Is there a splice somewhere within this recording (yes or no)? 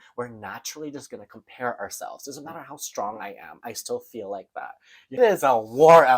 yes